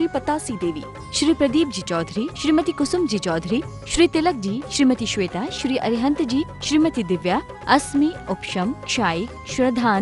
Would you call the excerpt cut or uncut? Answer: uncut